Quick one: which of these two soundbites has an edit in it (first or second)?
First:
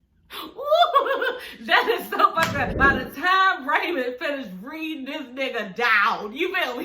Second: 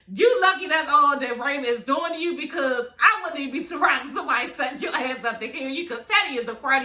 first